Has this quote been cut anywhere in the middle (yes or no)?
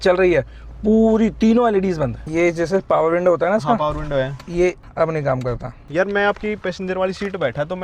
yes